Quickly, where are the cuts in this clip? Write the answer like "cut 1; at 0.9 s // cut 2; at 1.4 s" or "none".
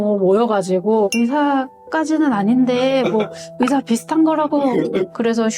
cut 1; at 1.1 s

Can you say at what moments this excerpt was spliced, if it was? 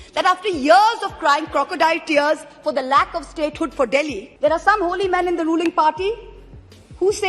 cut 1; at 4.2 s

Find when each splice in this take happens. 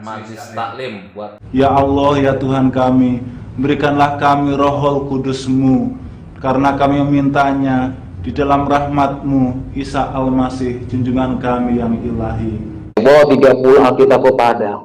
cut 1; at 1.4 s // cut 2; at 13.0 s

